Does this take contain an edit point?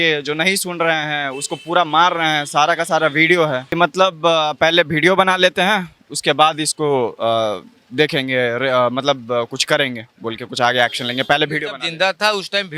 yes; 1 cut; at 3.7 s

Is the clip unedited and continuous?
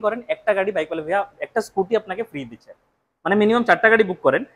yes; 0 cuts

